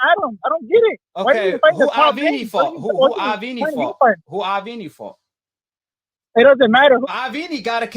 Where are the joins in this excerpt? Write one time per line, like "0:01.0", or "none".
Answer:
0:07.0

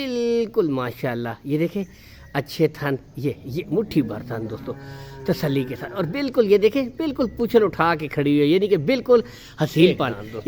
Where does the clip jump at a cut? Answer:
none

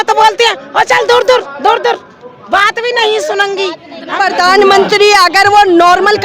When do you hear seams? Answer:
0:04.0

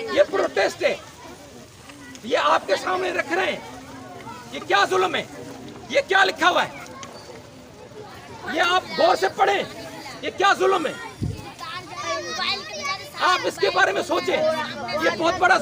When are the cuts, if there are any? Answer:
none

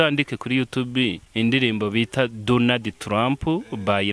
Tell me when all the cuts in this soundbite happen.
0:01.2

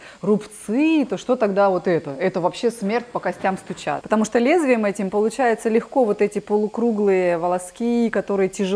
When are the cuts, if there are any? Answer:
0:04.0

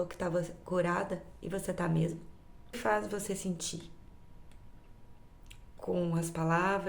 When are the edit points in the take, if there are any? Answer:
0:02.8

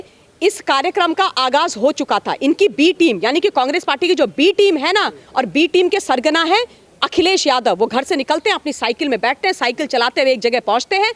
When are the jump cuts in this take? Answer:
none

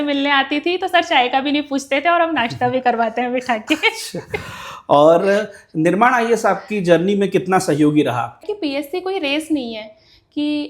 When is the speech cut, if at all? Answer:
0:08.4

